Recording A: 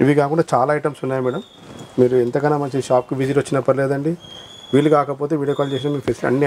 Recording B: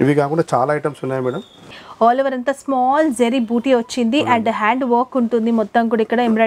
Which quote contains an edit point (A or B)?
B